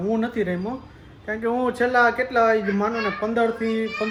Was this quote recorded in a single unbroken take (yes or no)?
yes